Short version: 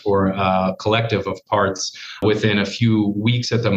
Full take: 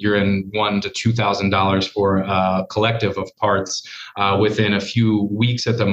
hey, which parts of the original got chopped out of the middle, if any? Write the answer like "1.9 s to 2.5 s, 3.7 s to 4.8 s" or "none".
4.1 s to 4.4 s